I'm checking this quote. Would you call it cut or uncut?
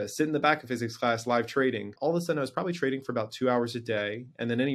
cut